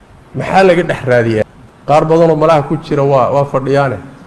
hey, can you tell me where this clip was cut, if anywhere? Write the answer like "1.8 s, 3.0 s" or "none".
1.5 s